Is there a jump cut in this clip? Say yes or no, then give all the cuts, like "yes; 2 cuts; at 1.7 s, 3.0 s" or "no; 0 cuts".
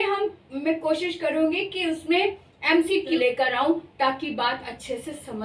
yes; 1 cut; at 3.2 s